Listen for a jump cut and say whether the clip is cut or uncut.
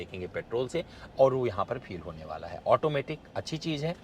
uncut